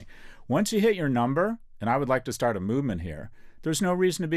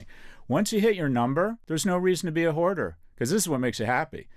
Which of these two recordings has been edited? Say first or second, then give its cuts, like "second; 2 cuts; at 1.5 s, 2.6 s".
second; 1 cut; at 1.6 s